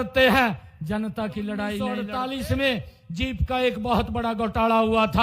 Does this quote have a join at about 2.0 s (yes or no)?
yes